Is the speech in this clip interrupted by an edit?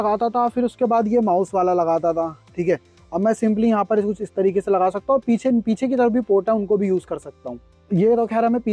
no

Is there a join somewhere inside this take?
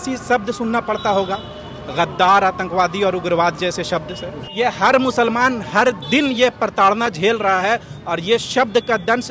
yes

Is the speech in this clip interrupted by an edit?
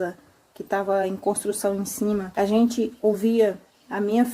yes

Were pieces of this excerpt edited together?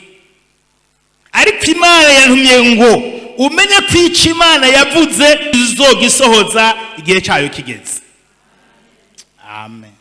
yes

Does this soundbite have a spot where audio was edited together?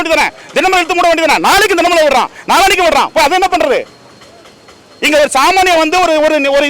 no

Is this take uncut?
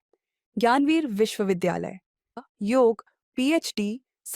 no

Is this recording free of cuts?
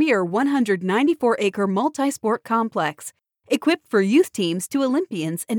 yes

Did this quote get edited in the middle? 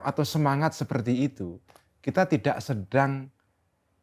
no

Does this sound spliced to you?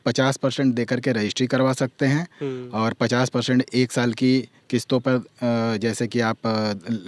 no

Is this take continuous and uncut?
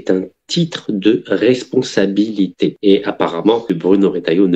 no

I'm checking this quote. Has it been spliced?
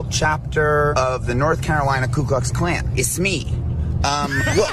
yes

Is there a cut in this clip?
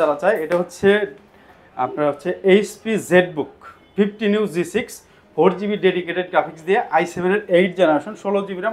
no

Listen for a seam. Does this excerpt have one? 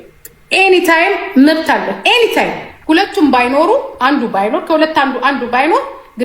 yes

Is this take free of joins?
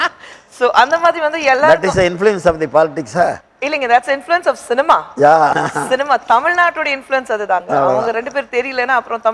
yes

